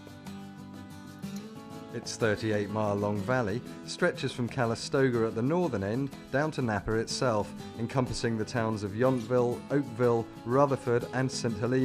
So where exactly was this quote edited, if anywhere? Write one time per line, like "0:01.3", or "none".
0:01.0